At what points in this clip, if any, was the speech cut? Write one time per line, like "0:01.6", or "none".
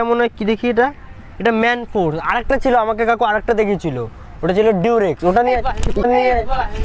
none